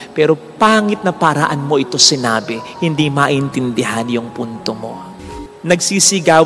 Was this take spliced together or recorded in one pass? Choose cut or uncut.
cut